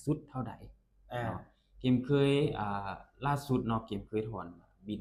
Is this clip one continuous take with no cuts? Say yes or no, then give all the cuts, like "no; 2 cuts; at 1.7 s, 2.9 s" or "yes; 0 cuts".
yes; 0 cuts